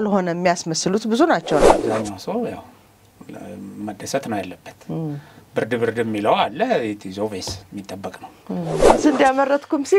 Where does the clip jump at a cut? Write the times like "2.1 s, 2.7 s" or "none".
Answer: 1.6 s, 8.8 s